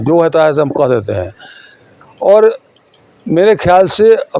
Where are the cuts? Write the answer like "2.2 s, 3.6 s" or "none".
none